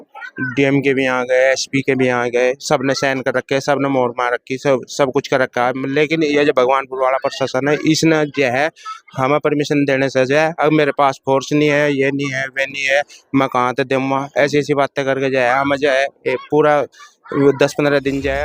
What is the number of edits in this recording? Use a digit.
0